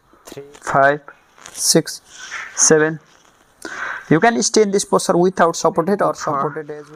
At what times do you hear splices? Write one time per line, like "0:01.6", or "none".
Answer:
none